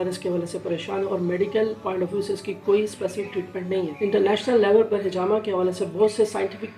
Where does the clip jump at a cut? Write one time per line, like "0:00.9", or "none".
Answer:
0:03.9